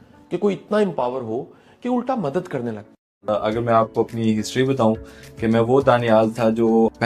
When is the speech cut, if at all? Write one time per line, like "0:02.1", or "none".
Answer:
0:03.2